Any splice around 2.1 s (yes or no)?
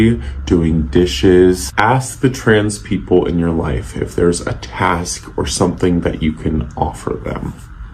yes